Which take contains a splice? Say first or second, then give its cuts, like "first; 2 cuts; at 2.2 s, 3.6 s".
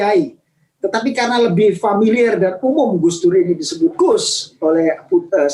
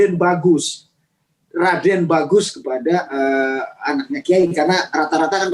second; 1 cut; at 1.4 s